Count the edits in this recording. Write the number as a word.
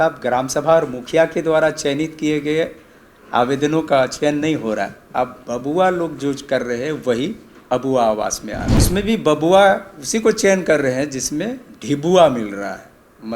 one